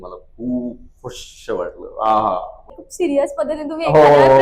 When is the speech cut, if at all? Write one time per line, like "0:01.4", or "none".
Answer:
0:02.8